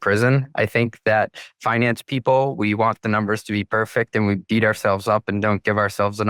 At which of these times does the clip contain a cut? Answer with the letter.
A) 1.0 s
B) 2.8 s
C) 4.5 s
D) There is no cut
D